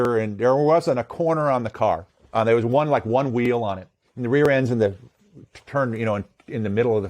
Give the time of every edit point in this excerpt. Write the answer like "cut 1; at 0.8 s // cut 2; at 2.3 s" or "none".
cut 1; at 2.1 s

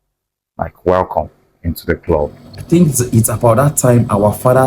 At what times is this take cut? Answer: cut 1; at 2.5 s

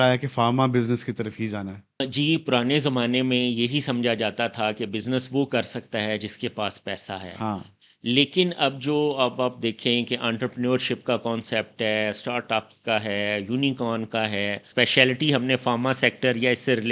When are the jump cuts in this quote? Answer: cut 1; at 2.0 s // cut 2; at 14.6 s

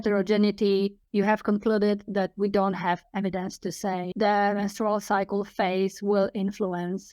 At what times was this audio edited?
cut 1; at 1.0 s // cut 2; at 4.1 s

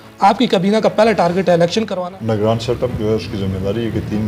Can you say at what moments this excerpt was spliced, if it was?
cut 1; at 1.9 s

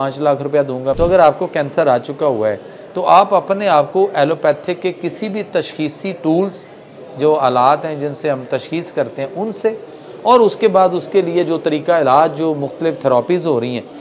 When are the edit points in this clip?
cut 1; at 1.0 s

